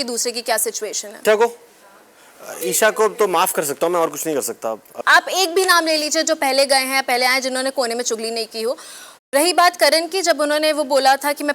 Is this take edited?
yes; 3 cuts; at 1.1 s, 4.9 s, 9.1 s

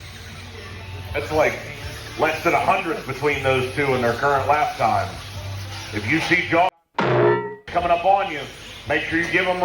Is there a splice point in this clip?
yes; 2 cuts; at 6.7 s, 7.6 s

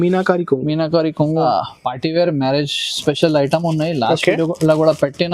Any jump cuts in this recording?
yes; 1 cut; at 1.4 s

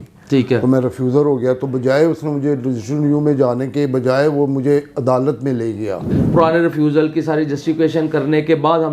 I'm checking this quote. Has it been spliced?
yes; 1 cut; at 6.1 s

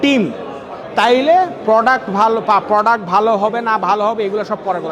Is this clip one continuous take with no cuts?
yes; 0 cuts

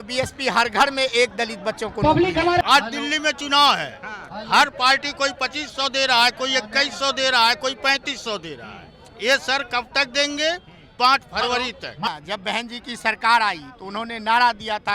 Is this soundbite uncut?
no; 2 cuts; at 2.6 s, 12.1 s

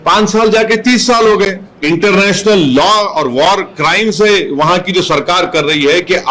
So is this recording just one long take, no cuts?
no; 1 cut; at 1.7 s

